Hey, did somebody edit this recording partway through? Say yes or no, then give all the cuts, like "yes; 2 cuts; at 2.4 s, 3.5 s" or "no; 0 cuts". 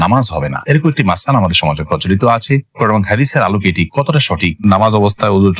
yes; 1 cut; at 4.6 s